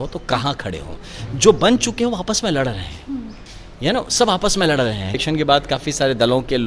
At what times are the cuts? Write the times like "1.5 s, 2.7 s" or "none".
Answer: 5.2 s